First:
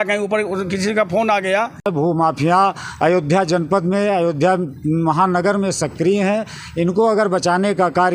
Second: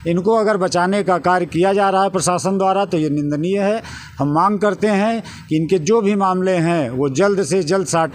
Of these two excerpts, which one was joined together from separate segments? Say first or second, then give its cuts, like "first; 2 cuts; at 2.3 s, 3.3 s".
first; 1 cut; at 2.0 s